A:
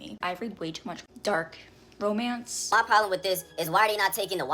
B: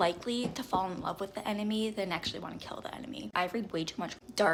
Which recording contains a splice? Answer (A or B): A